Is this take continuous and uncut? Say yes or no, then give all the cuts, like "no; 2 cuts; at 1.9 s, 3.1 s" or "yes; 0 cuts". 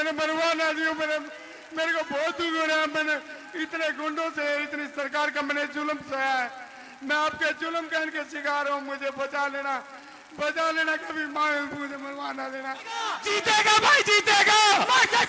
no; 1 cut; at 13.2 s